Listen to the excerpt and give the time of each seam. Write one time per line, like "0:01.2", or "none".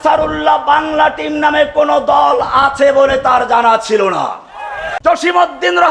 0:04.9